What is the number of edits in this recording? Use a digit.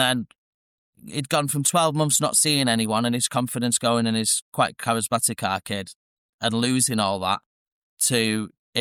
0